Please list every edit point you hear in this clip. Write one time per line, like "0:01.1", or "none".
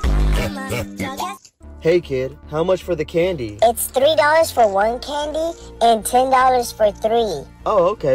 none

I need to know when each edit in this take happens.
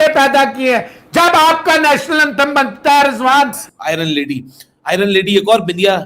0:03.6

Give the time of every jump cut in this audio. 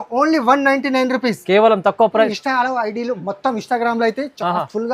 0:02.2

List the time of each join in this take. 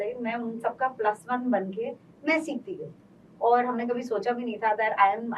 none

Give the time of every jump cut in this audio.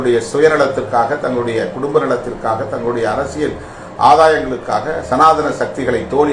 none

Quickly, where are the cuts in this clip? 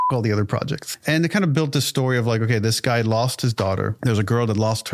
0:00.9
0:03.9

